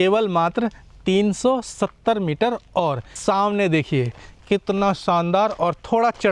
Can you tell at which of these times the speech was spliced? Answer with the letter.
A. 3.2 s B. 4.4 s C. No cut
A